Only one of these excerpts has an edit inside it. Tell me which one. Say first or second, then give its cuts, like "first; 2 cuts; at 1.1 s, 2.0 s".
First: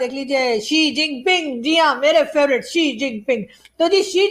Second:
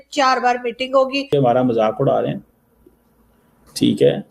second; 1 cut; at 1.3 s